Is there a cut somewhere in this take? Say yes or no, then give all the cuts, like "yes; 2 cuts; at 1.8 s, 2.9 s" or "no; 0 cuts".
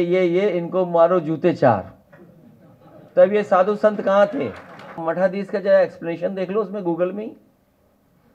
yes; 1 cut; at 5.0 s